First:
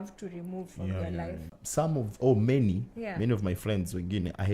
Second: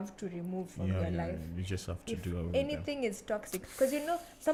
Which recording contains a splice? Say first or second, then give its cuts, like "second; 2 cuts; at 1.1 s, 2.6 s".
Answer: first; 1 cut; at 1.6 s